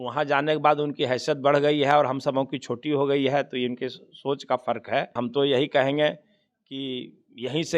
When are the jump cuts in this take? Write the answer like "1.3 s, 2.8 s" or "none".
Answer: 5.2 s

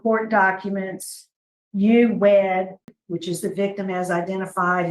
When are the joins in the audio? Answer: 2.9 s

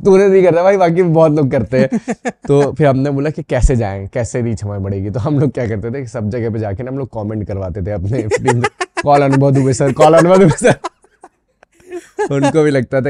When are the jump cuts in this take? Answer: none

